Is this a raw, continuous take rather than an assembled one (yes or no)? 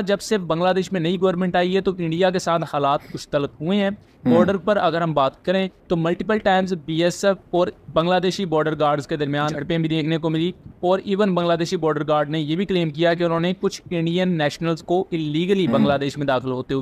yes